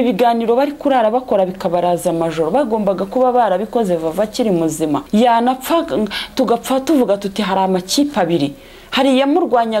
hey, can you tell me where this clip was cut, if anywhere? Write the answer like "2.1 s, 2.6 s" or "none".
5.0 s